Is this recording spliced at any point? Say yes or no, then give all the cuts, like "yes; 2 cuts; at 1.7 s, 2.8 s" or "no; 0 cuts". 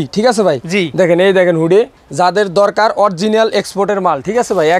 yes; 1 cut; at 2.0 s